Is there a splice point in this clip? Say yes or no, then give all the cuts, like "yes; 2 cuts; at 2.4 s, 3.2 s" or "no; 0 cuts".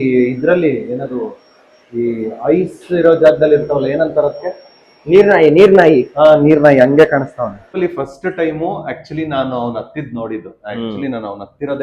yes; 1 cut; at 7.7 s